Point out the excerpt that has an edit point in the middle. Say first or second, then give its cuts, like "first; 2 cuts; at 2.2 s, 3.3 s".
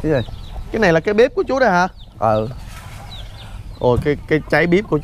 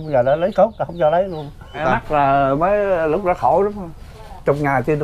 second; 1 cut; at 1.8 s